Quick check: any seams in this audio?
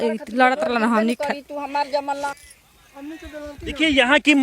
yes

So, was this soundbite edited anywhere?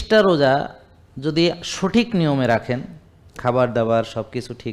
no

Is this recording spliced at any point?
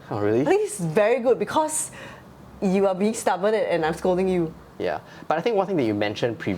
yes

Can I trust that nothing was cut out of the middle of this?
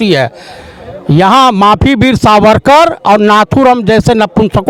yes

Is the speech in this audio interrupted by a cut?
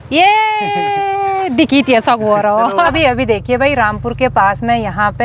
yes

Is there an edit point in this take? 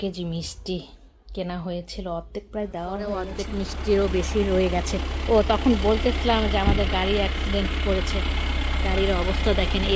yes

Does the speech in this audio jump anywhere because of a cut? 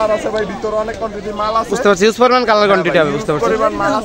no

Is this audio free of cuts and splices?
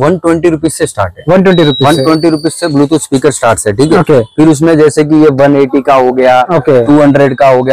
yes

